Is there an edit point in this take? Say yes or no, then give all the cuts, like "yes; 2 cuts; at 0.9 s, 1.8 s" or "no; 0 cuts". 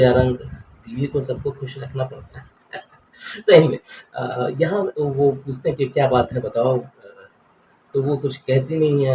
no; 0 cuts